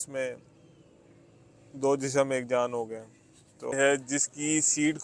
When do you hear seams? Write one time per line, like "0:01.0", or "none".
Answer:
0:03.8